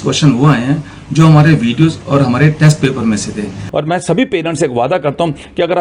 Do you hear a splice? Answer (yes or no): yes